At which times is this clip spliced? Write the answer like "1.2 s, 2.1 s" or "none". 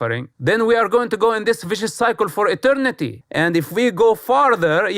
3.2 s